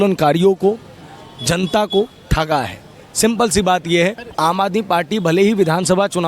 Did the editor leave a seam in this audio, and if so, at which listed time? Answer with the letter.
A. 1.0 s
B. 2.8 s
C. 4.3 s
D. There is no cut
C